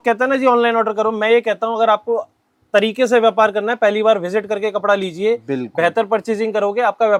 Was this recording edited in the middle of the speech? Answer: no; 0 cuts

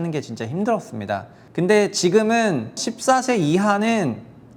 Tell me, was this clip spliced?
yes; 2 cuts; at 1.4 s, 2.8 s

